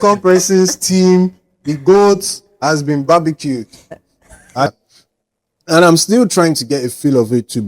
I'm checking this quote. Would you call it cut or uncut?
cut